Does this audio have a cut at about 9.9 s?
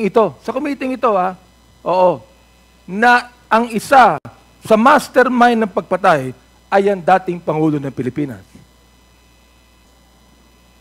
yes; 1 cut; at 9.9 s

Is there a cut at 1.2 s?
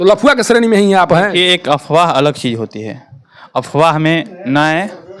no; 0 cuts

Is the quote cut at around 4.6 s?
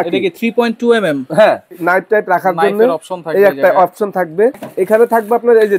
yes; 2 cuts; at 1.7 s, 4.6 s

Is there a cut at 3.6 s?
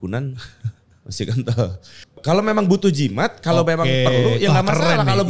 no; 1 cut; at 1.9 s

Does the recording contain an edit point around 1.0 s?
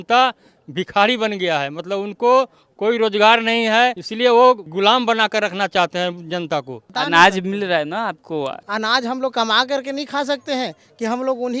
no; 4 cuts; at 4.0 s, 4.7 s, 6.8 s, 8.6 s

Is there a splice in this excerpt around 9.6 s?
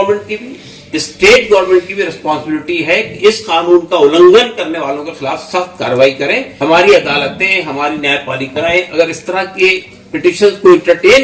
no; 1 cut; at 6.5 s

